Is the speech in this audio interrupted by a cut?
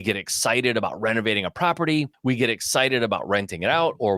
yes; 1 cut; at 2.1 s

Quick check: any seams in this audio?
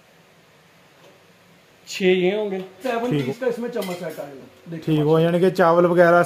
yes; 1 cut; at 2.7 s

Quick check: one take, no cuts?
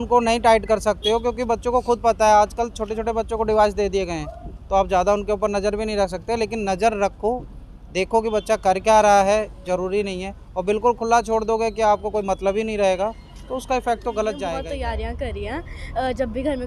no; 1 cut; at 14.6 s

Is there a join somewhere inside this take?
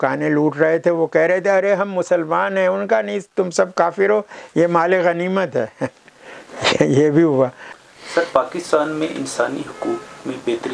no; 0 cuts

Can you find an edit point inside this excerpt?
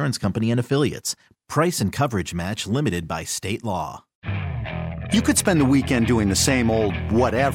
yes; 1 cut; at 4.1 s

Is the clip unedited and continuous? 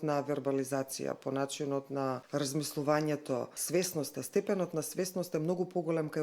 no; 2 cuts; at 2.2 s, 3.6 s

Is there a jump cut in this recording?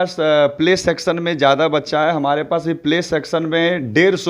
no; 0 cuts

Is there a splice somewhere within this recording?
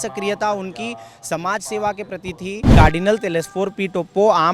yes; 1 cut; at 2.7 s

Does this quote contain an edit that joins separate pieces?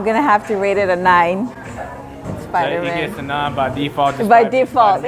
no; 0 cuts

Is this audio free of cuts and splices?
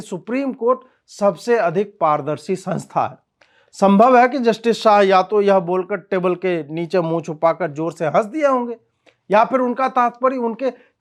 yes; 0 cuts

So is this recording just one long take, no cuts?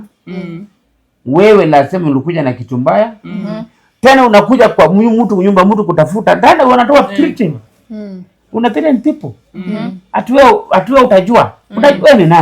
yes; 0 cuts

